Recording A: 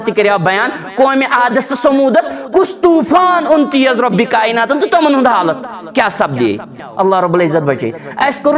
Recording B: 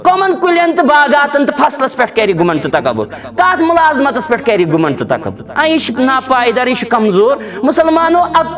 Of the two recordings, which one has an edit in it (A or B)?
A